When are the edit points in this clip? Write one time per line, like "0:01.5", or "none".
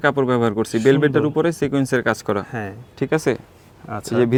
none